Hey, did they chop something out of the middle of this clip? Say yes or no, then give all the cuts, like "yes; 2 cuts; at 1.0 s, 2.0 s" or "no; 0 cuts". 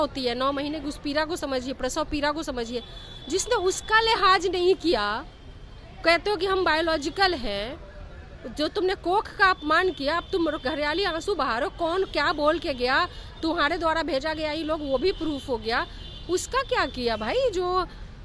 no; 0 cuts